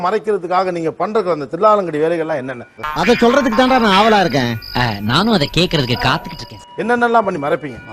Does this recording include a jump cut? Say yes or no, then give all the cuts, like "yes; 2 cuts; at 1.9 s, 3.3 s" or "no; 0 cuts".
no; 0 cuts